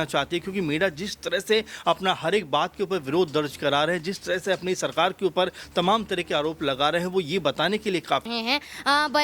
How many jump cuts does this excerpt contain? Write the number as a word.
one